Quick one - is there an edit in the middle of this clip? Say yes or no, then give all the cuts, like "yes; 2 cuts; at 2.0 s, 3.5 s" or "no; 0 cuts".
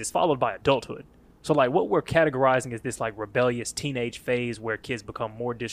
no; 0 cuts